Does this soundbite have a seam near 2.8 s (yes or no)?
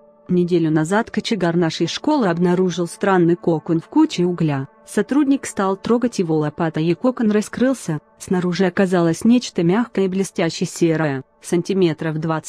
no